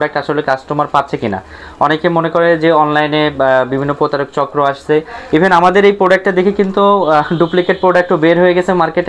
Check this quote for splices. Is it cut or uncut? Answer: uncut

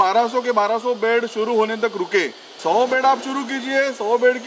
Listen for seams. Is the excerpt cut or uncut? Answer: cut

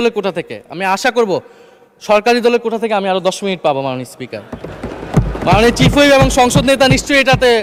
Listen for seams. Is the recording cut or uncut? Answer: uncut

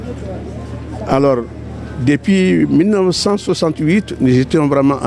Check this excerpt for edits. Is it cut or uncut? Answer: uncut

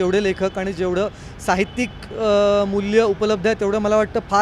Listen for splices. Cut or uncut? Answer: uncut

